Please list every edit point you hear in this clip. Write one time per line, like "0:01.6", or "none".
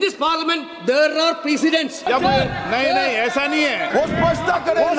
0:02.1
0:03.9